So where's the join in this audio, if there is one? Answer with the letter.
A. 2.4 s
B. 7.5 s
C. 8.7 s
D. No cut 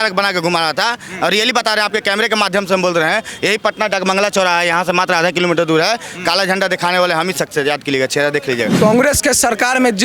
C